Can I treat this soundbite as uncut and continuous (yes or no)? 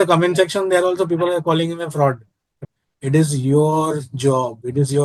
no